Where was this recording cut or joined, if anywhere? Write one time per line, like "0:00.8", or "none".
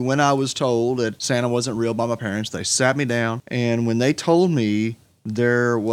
0:01.2
0:03.4